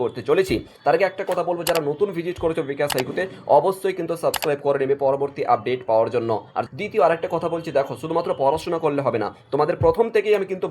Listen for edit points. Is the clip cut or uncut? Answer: cut